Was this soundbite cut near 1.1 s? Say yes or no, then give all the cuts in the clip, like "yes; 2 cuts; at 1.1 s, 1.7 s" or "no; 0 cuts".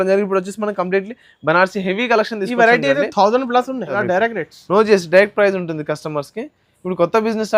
no; 1 cut; at 4.0 s